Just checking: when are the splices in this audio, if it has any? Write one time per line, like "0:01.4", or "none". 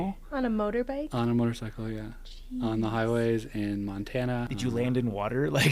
0:04.5